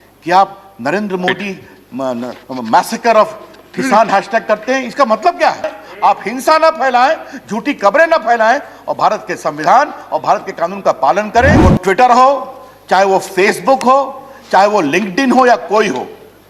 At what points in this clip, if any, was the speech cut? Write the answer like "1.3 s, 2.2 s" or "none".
5.8 s, 11.6 s